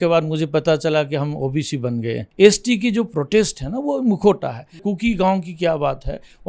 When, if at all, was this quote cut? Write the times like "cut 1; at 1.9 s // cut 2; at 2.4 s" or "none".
cut 1; at 2.2 s // cut 2; at 4.9 s